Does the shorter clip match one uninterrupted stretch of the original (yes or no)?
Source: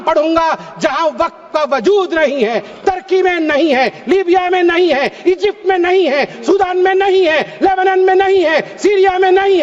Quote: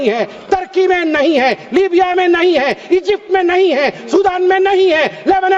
yes